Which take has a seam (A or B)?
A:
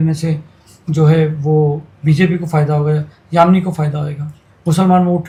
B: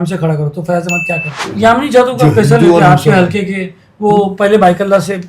B